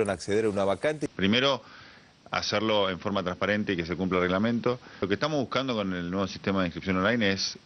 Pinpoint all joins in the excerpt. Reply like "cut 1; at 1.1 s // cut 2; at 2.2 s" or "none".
cut 1; at 1.1 s